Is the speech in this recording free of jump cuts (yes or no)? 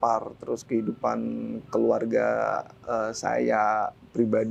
yes